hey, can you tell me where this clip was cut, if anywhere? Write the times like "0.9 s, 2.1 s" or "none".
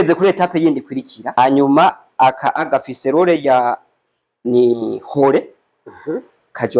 1.4 s